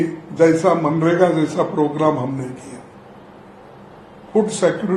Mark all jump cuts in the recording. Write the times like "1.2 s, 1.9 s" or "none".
none